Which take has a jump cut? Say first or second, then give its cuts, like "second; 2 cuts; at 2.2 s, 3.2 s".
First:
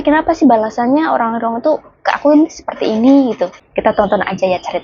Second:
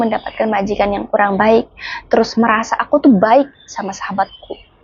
first; 1 cut; at 3.6 s